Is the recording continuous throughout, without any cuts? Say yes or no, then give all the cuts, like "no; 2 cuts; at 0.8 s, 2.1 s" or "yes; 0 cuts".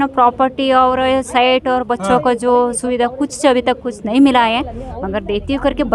yes; 0 cuts